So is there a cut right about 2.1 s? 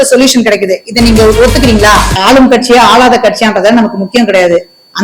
yes; 1 cut; at 2.1 s

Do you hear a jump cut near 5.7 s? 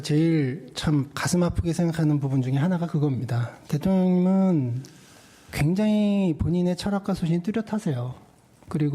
no; 1 cut; at 1.4 s

